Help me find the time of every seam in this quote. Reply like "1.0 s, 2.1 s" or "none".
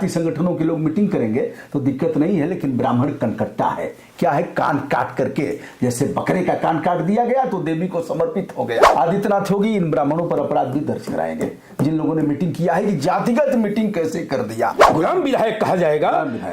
8.9 s, 14.8 s